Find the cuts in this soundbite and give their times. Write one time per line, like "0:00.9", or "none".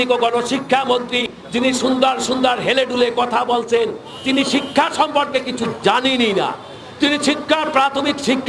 0:01.3

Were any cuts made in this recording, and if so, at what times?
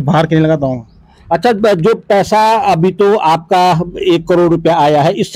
none

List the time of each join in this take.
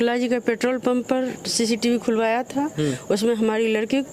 none

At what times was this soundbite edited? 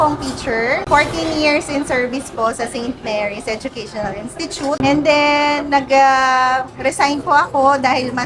none

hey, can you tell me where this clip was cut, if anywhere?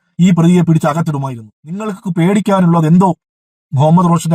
0:01.9

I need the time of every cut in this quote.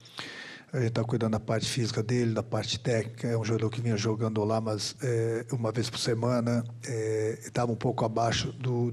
none

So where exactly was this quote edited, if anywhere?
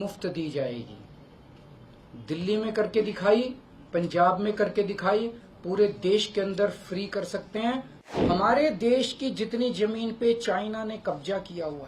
0:08.2

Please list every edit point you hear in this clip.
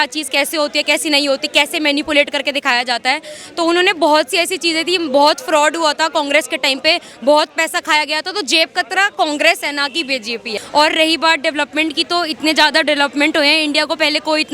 0:10.6

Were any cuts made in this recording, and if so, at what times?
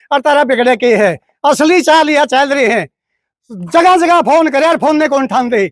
none

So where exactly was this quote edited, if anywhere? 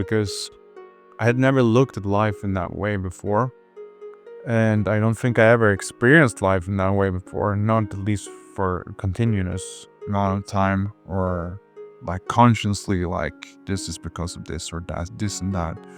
none

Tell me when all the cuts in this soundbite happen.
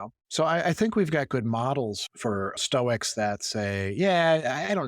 0:02.1

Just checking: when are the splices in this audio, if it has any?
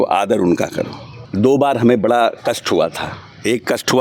0:01.2

